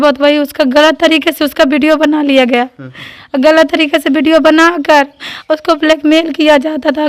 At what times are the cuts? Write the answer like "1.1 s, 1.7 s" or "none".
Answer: none